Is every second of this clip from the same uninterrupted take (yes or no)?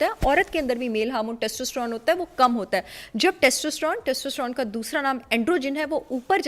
yes